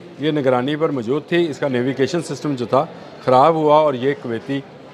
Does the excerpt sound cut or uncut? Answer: uncut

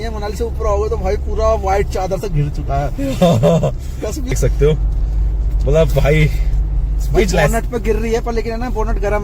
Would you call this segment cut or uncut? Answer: cut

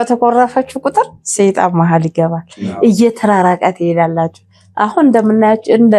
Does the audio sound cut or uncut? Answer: uncut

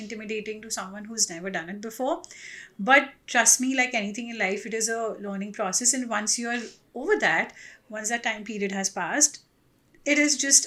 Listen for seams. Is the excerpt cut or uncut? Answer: uncut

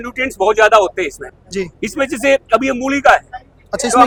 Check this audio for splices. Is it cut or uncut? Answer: uncut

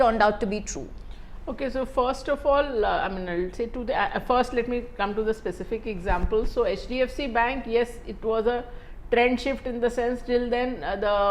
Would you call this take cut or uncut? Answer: uncut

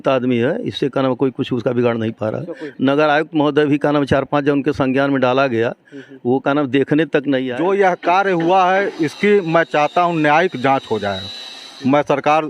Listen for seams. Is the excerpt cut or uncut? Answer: cut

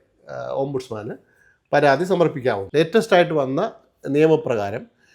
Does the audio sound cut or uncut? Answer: cut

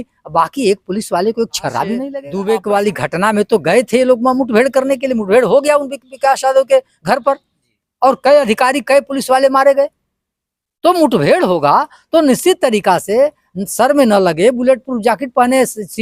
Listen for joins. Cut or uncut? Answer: cut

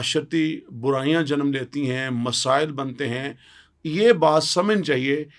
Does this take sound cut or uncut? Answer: uncut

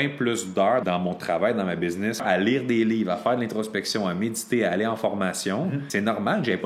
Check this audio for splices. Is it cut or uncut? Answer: cut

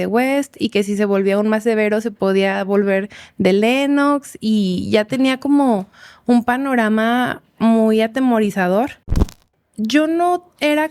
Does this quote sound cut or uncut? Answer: cut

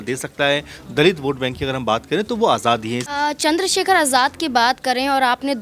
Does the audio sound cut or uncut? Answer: cut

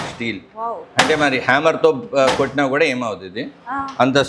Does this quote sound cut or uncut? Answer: uncut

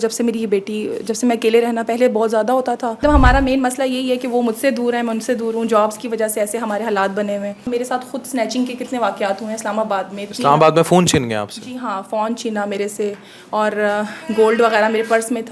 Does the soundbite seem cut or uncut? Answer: cut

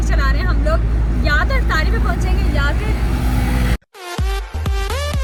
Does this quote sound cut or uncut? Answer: uncut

